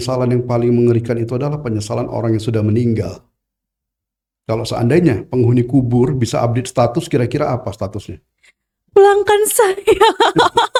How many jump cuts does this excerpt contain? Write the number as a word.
zero